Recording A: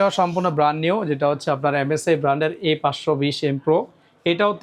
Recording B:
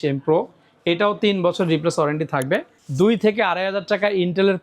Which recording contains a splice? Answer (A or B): B